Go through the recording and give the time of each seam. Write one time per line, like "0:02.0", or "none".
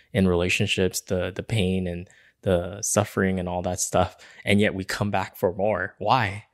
none